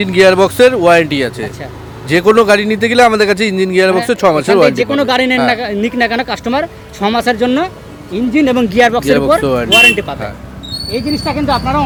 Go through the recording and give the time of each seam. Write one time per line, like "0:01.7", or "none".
none